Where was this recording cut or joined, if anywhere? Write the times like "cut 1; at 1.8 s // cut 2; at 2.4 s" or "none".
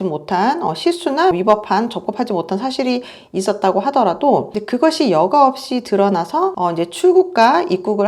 cut 1; at 1.3 s // cut 2; at 6.5 s